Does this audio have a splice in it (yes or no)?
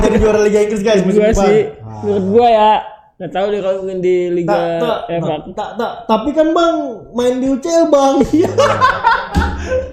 no